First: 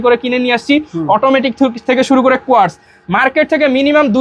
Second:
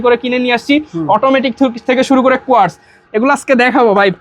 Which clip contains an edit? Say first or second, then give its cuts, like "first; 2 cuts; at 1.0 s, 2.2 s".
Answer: second; 1 cut; at 2.9 s